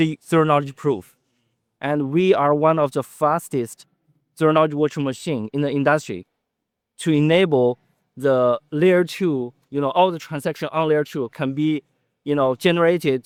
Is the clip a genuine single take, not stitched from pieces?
yes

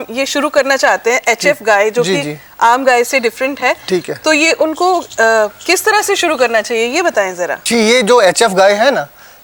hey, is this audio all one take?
yes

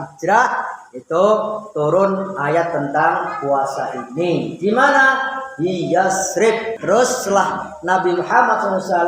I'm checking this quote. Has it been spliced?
yes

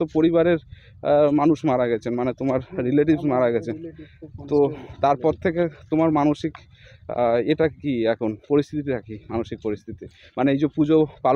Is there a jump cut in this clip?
no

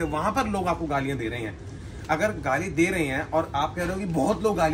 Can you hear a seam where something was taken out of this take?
no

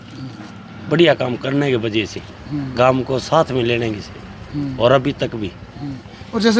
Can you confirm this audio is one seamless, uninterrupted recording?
yes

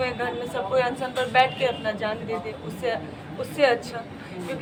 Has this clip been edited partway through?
no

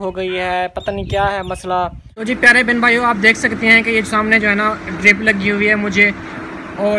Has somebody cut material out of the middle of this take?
yes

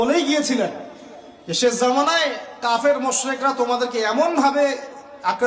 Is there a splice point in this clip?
no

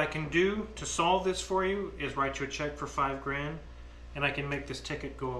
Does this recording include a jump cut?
no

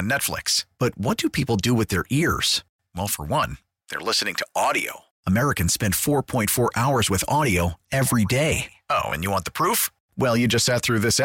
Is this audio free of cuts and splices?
yes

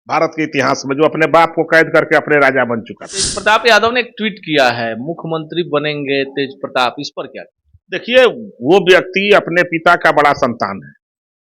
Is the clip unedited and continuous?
no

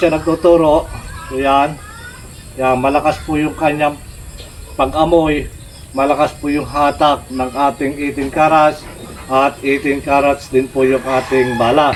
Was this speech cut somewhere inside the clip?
no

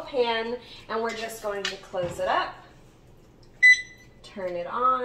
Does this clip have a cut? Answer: no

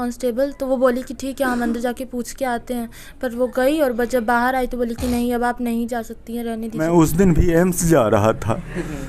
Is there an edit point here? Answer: yes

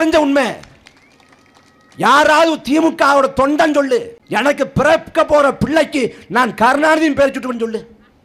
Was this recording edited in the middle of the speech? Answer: yes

